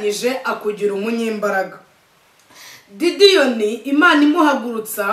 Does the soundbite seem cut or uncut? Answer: uncut